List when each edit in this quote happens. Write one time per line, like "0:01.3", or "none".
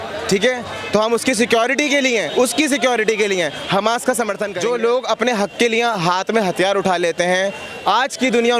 0:04.5